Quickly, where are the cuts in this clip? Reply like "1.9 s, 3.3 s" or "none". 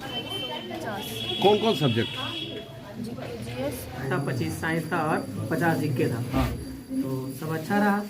4.0 s

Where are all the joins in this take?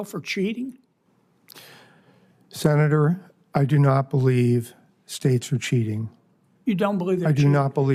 none

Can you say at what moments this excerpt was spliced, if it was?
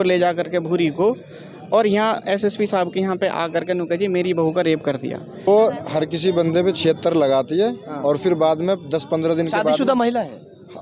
5.5 s

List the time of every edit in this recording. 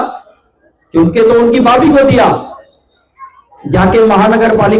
none

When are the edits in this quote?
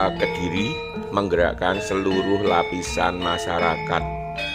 none

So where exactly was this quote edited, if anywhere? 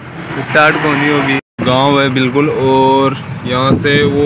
1.4 s

